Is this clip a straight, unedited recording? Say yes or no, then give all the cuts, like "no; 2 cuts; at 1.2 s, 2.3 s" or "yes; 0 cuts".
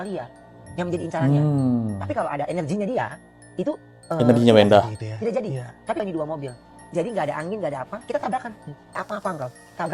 no; 2 cuts; at 6.0 s, 9.0 s